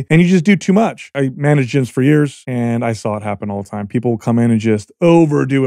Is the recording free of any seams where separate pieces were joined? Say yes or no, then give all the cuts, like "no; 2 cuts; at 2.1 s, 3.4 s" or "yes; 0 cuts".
no; 2 cuts; at 1.1 s, 2.4 s